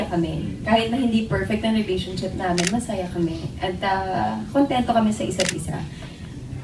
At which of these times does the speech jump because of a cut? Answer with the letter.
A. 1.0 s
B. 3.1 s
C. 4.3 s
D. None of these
D